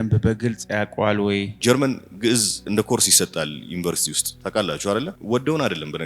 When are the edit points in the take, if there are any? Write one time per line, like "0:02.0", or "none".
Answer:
0:01.5
0:05.2